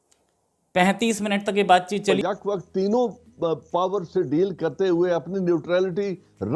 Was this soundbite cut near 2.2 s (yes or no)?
yes